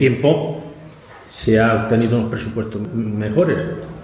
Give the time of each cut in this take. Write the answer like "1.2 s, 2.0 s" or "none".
2.8 s